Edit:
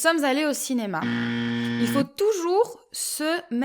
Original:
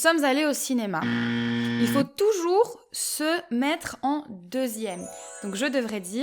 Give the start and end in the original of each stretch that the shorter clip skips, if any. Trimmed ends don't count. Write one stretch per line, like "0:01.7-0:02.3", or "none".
none